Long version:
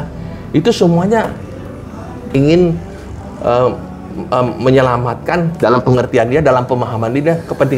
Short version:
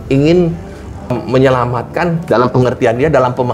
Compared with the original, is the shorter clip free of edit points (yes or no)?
no